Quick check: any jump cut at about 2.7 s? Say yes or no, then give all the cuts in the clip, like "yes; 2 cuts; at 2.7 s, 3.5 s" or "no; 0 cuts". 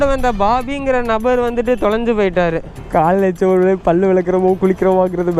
yes; 1 cut; at 2.7 s